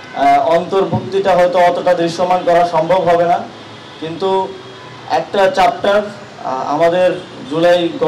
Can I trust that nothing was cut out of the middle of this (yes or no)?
yes